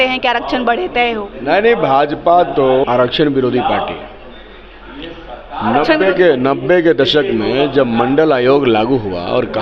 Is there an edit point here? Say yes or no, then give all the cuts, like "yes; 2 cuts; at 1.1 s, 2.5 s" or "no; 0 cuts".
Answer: no; 0 cuts